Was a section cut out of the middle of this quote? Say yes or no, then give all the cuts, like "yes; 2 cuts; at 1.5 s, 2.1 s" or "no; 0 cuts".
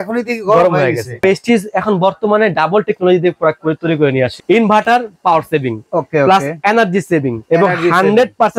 yes; 3 cuts; at 1.2 s, 4.4 s, 7.4 s